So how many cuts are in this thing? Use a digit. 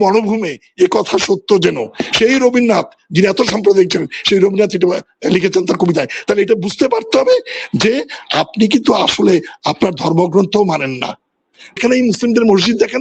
1